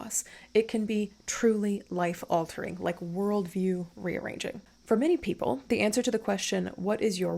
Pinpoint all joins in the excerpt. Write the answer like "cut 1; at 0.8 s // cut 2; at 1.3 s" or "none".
cut 1; at 4.7 s